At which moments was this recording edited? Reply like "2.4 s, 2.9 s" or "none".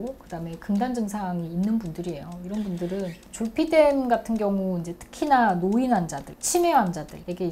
3.3 s